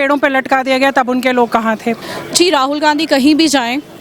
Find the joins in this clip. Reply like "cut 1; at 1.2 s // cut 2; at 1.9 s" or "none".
cut 1; at 2.1 s